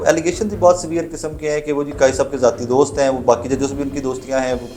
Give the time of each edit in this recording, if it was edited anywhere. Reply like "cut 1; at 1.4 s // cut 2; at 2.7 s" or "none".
none